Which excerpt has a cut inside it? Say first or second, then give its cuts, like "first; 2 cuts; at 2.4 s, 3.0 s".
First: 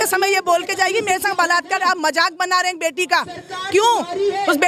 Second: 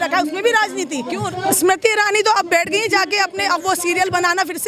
second; 1 cut; at 1.2 s